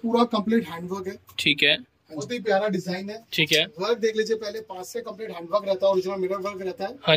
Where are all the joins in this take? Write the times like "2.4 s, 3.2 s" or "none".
2.3 s